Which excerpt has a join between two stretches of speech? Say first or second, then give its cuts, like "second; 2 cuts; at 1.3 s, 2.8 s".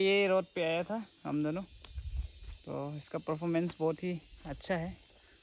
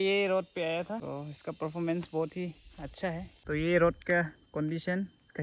second; 2 cuts; at 1.0 s, 3.3 s